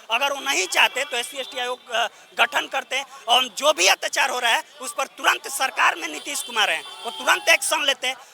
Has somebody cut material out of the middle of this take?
no; 0 cuts

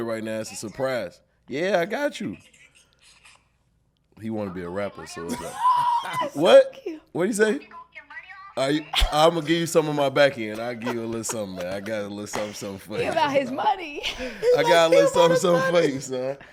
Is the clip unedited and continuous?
yes; 0 cuts

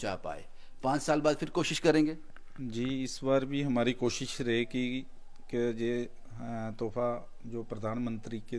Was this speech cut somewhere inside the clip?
no; 0 cuts

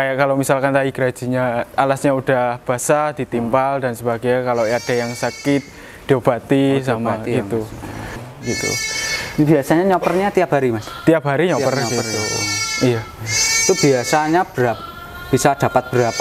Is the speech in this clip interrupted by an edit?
yes; 1 cut; at 8.2 s

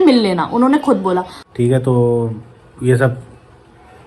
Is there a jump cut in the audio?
yes; 1 cut; at 1.4 s

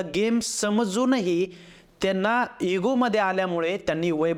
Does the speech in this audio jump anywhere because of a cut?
no; 0 cuts

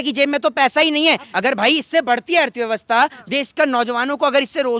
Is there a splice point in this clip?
yes; 1 cut; at 1.3 s

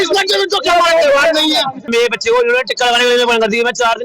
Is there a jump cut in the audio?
yes; 1 cut; at 1.9 s

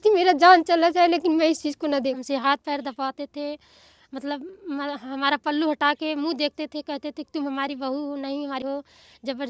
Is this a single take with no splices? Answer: no; 2 cuts; at 2.2 s, 8.6 s

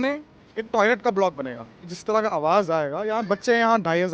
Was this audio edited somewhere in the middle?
yes; 1 cut; at 1.9 s

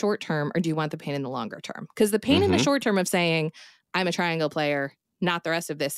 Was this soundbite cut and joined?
no; 0 cuts

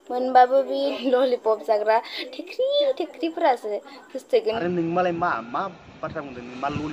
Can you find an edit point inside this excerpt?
yes; 2 cuts; at 0.9 s, 4.6 s

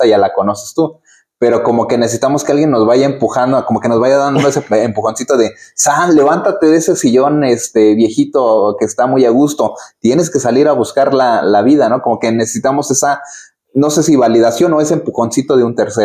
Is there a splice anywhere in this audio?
no; 0 cuts

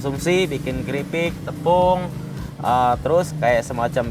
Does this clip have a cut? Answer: no; 0 cuts

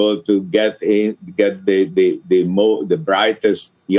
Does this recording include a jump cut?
no; 0 cuts

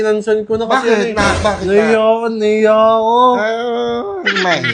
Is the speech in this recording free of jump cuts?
yes; 0 cuts

